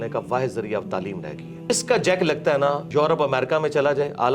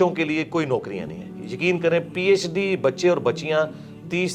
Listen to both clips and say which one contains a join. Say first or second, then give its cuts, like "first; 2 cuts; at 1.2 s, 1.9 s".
first; 2 cuts; at 1.7 s, 2.8 s